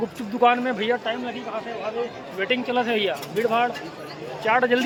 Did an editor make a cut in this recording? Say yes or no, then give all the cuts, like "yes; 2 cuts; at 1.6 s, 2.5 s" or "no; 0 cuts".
no; 0 cuts